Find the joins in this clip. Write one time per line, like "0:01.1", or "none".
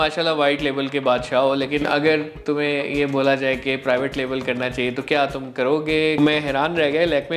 0:06.2